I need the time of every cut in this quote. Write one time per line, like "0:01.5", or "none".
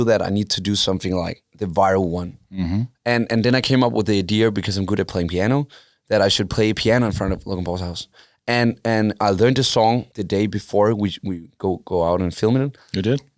0:01.4
0:10.1